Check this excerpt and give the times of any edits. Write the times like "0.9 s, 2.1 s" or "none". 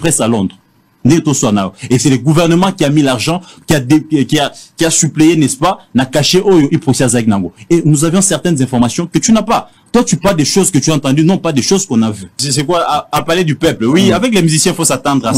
12.4 s